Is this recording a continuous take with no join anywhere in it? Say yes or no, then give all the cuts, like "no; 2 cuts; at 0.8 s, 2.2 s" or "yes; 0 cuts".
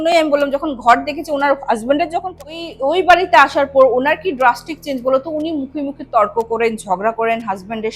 no; 1 cut; at 2.6 s